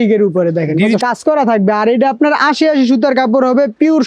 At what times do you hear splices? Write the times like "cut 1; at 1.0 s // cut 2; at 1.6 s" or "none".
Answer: cut 1; at 1.0 s